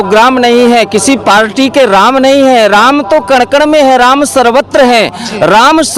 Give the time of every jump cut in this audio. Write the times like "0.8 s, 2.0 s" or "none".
none